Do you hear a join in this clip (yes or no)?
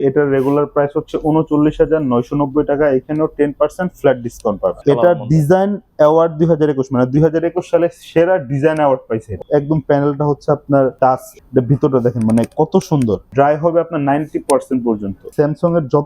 yes